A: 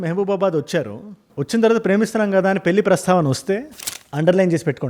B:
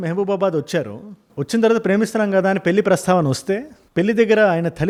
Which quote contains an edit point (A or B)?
A